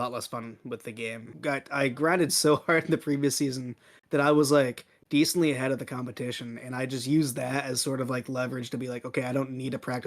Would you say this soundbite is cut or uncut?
cut